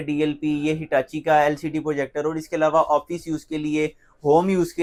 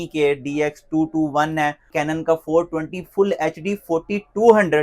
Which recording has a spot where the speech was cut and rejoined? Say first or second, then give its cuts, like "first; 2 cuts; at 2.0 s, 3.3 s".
second; 1 cut; at 1.9 s